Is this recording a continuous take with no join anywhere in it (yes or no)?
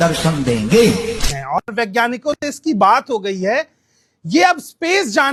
yes